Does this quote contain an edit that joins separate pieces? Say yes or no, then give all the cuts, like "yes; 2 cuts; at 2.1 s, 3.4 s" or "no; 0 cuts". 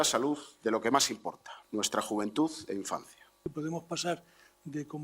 yes; 2 cuts; at 1.5 s, 3.5 s